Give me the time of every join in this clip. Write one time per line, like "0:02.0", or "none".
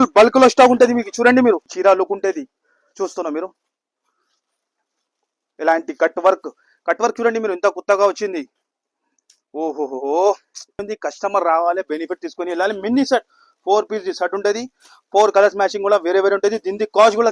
0:01.7
0:10.9